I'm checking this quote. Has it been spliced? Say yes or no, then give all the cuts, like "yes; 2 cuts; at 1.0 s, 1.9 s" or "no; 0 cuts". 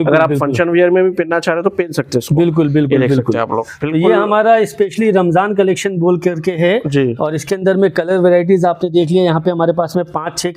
no; 0 cuts